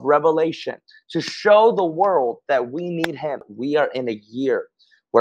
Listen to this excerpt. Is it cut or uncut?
cut